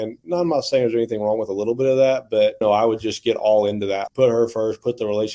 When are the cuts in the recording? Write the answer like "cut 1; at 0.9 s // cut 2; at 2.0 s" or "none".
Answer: cut 1; at 2.6 s // cut 2; at 4.0 s